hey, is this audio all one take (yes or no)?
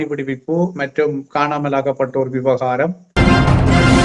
no